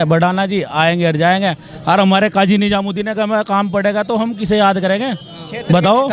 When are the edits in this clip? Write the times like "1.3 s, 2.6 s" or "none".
none